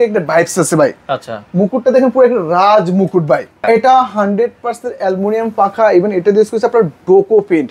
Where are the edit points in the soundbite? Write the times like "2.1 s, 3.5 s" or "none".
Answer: 3.6 s